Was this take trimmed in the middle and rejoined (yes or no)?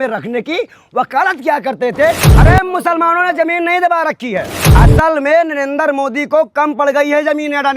yes